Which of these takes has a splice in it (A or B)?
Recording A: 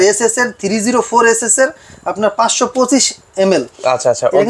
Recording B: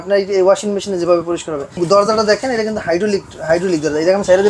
B